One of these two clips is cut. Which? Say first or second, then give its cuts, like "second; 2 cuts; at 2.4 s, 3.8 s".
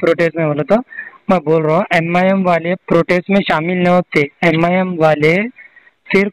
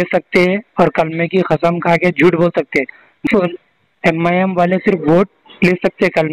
second; 1 cut; at 3.3 s